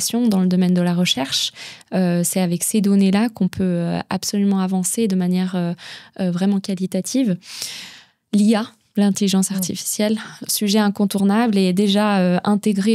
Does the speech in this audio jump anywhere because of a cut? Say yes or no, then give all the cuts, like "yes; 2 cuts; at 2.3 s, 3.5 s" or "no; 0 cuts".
no; 0 cuts